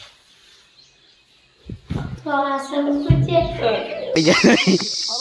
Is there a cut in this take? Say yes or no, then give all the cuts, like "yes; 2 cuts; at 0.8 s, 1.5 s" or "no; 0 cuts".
yes; 1 cut; at 4.1 s